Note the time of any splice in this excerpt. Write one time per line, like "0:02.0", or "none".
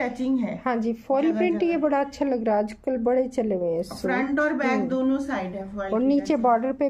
none